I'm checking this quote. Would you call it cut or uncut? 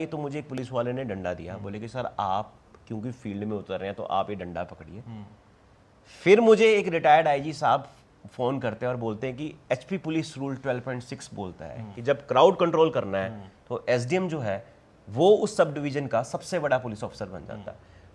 uncut